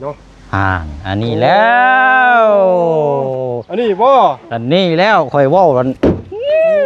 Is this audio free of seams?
yes; 0 cuts

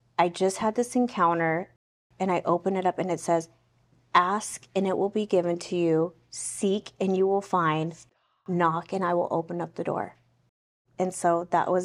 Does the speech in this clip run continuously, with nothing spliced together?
no; 2 cuts; at 1.8 s, 10.8 s

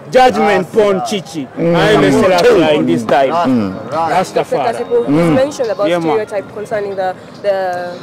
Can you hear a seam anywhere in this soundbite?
no; 0 cuts

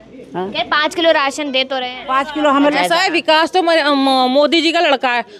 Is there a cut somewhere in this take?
yes; 1 cut; at 2.7 s

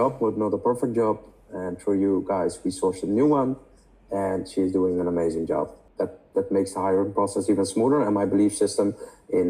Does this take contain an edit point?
yes; 1 cut; at 5.8 s

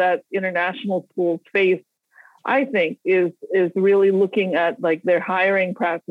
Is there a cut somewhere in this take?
no; 0 cuts

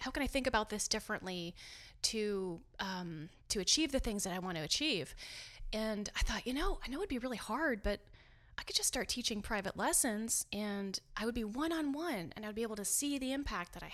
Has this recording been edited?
no; 0 cuts

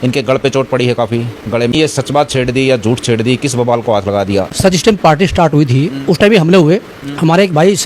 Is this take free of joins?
no; 2 cuts; at 1.7 s, 4.6 s

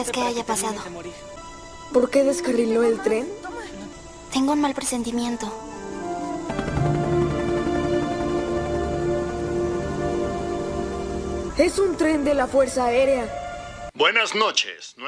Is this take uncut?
no; 1 cut; at 13.8 s

